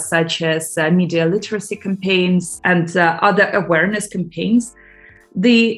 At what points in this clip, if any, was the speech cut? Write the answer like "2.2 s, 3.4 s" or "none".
2.5 s, 4.7 s